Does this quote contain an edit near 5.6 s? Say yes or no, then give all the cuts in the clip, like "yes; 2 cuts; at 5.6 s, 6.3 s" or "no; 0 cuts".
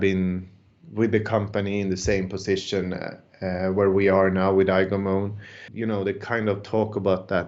yes; 1 cut; at 5.6 s